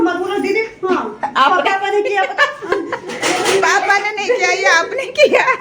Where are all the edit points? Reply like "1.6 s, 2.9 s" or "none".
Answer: 2.7 s